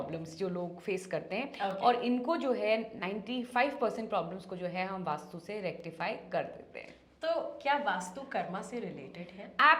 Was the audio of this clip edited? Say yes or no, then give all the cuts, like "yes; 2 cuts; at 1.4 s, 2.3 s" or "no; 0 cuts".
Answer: no; 0 cuts